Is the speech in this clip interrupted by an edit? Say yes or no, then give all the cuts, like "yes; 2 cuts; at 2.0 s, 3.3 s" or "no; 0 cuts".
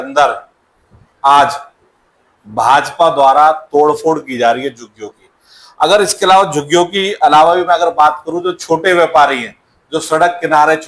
no; 0 cuts